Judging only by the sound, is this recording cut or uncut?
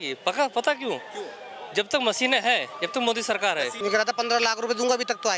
cut